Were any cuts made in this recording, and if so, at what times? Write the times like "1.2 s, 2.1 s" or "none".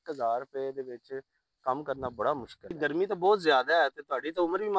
2.8 s